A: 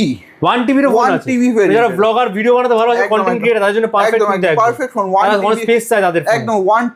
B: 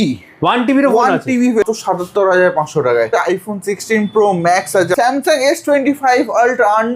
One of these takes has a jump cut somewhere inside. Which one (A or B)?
B